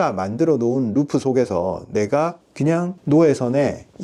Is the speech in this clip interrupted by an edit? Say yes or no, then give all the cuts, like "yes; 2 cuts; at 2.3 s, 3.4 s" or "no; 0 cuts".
no; 0 cuts